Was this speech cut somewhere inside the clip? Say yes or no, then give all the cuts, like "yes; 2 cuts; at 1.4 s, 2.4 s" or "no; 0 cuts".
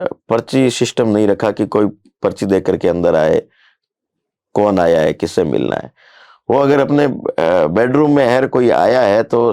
no; 0 cuts